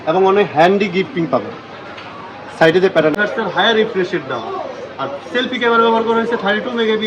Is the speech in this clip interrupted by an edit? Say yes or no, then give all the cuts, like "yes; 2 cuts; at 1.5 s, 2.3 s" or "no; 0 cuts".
yes; 1 cut; at 3.1 s